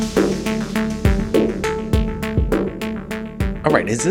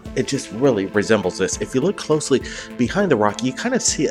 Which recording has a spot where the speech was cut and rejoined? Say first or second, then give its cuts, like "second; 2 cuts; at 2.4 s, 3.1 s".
second; 1 cut; at 3.2 s